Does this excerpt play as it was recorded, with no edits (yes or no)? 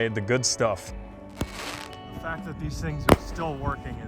no